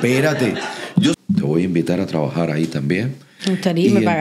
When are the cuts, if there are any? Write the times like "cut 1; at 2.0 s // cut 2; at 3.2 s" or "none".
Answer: cut 1; at 1.2 s